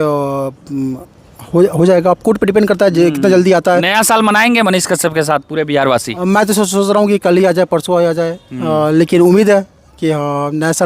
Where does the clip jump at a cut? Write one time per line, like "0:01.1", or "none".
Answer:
none